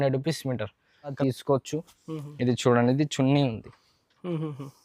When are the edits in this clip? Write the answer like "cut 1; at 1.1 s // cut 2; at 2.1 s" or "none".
cut 1; at 1.1 s